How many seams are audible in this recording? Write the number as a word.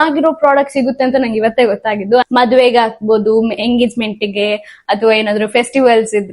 one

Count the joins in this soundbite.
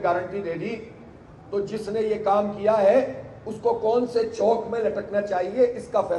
zero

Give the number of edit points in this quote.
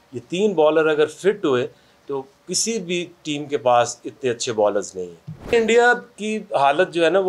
one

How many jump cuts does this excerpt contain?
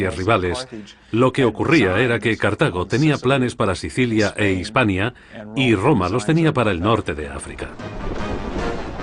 one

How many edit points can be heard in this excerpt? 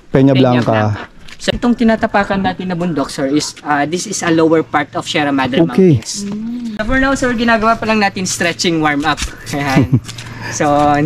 two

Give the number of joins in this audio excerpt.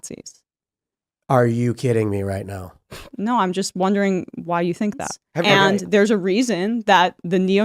one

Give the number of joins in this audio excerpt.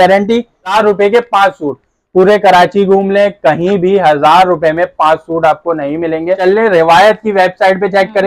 two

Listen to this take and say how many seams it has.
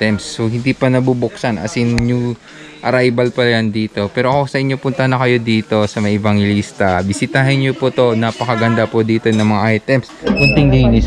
one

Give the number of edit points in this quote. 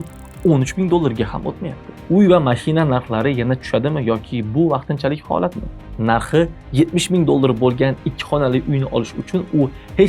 two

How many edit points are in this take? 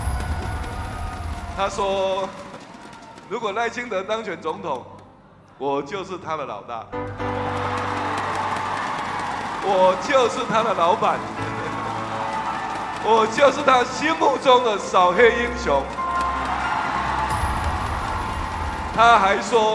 zero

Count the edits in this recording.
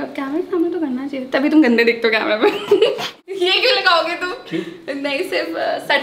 one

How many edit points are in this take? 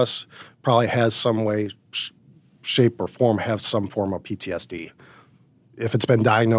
zero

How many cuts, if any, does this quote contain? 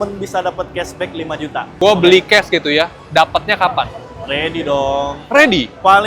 one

